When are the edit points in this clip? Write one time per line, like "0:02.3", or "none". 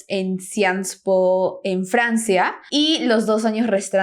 0:02.6